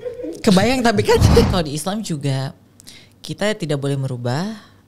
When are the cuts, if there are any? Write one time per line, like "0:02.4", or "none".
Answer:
0:01.5